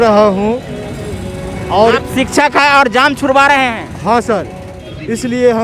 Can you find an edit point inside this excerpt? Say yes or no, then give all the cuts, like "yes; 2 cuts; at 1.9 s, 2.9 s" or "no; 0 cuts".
yes; 1 cut; at 4.7 s